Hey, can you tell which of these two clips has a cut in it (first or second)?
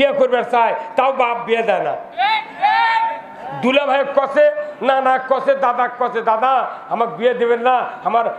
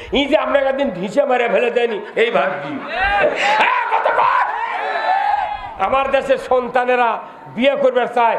second